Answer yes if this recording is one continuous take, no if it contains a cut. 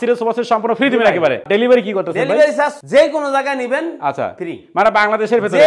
no